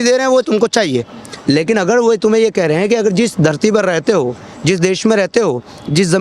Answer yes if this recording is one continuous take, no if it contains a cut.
yes